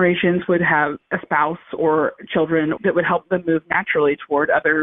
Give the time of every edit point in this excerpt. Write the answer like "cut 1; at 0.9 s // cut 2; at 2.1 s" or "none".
cut 1; at 2.7 s